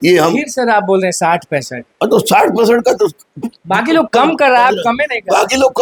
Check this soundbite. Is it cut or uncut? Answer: uncut